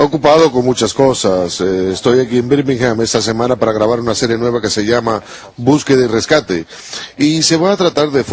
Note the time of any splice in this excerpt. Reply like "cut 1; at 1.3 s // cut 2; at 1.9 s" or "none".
cut 1; at 1.5 s